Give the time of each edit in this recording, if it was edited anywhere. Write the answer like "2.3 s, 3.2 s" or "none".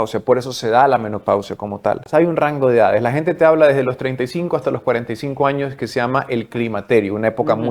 2.0 s